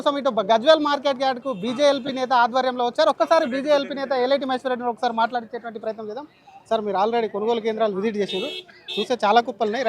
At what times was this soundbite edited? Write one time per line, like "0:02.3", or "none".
0:06.5